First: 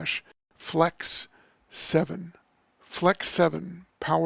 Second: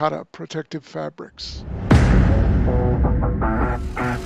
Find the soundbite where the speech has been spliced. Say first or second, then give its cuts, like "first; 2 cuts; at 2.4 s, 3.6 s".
second; 1 cut; at 1.6 s